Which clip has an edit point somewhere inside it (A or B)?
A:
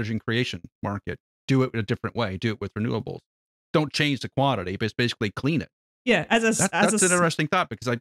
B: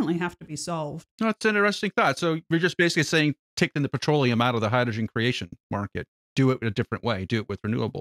B